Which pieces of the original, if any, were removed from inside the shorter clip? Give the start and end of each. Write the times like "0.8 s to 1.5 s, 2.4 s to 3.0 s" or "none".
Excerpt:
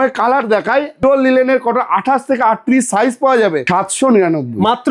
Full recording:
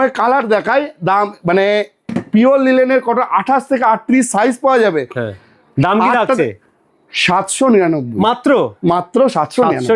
1.0 s to 2.4 s, 5.0 s to 7.2 s

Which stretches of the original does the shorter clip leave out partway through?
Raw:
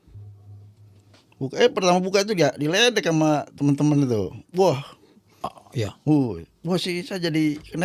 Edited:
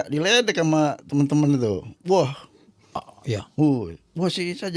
none

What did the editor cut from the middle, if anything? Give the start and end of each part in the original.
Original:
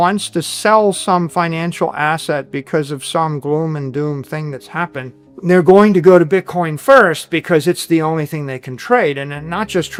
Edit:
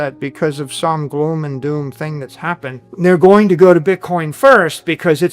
5.1 s to 5.2 s

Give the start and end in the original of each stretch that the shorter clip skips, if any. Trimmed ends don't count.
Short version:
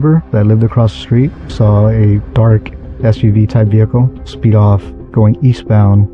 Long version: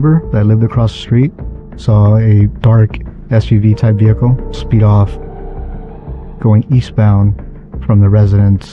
1.4 s to 1.7 s, 5.2 s to 6.2 s

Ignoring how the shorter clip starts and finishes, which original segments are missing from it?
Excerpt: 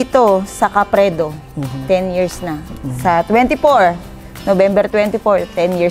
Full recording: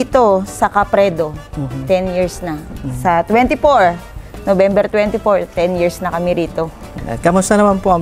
none

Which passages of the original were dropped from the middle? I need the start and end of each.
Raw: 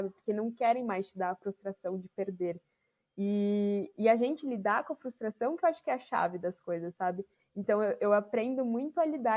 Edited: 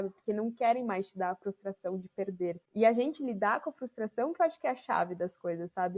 2.7 s to 3.9 s

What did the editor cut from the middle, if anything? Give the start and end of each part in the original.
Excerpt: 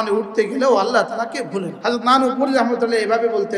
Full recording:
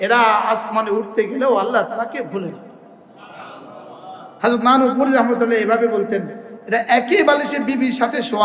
2.5 s to 4.3 s

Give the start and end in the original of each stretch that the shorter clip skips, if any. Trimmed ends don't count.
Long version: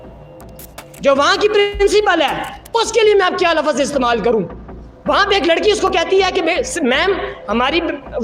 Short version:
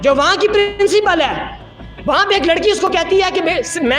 2.6 s to 4.6 s

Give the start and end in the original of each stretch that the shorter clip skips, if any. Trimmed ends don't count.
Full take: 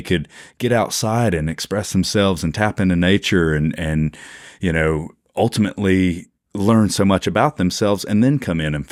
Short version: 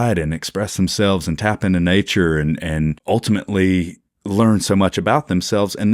4.1 s to 5.3 s

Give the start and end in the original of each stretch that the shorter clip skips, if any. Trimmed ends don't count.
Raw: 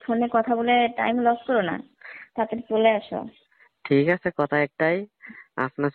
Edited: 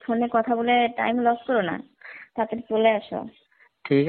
none

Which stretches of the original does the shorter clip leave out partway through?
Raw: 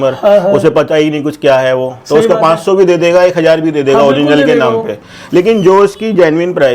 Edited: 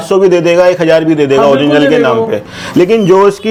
none

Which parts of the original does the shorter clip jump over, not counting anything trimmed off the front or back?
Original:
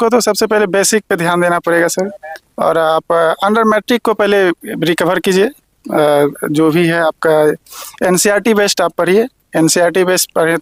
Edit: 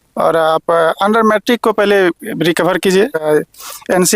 5.7 s to 7.4 s

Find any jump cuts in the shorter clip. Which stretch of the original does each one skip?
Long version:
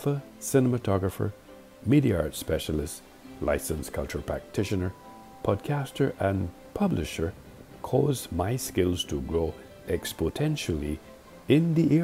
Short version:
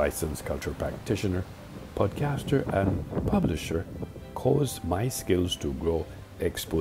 none

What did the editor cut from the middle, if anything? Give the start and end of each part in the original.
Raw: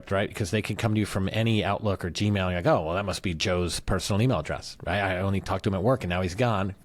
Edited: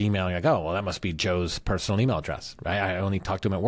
none

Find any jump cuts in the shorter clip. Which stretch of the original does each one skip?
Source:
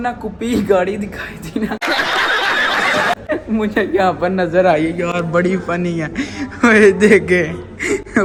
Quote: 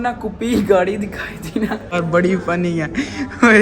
1.9 s to 5.1 s

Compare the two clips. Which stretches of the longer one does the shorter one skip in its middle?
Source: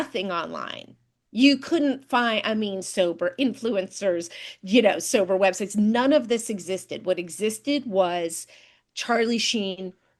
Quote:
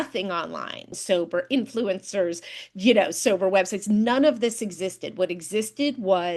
0.9 s to 2.8 s

